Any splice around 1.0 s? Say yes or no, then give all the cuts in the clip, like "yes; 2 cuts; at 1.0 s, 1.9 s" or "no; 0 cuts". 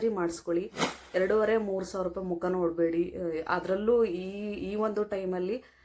no; 0 cuts